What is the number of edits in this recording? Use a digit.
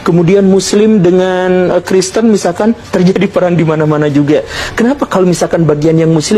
0